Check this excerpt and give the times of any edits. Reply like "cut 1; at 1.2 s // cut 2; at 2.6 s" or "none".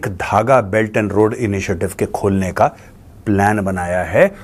none